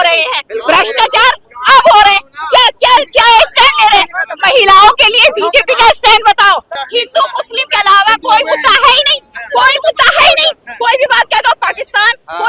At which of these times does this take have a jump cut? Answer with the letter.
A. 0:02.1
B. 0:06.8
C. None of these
B